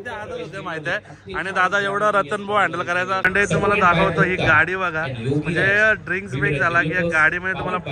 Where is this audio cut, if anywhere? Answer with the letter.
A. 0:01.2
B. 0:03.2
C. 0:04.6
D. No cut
B